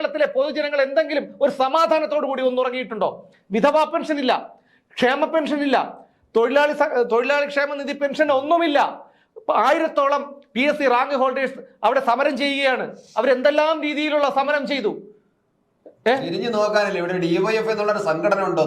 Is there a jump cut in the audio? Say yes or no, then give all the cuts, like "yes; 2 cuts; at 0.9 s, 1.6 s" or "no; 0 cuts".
no; 0 cuts